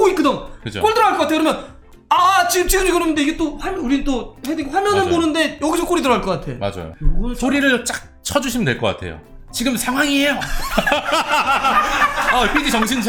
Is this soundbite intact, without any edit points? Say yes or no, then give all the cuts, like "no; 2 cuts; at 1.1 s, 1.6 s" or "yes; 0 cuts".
yes; 0 cuts